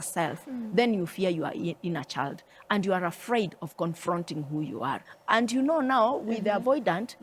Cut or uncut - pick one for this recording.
cut